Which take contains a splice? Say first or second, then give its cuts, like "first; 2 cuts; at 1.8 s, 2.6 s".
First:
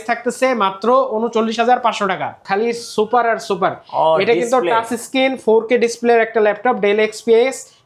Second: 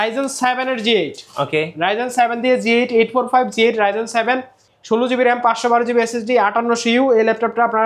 first; 1 cut; at 2.4 s